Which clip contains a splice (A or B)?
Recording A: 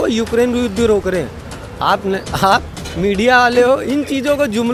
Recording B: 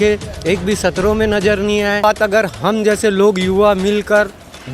B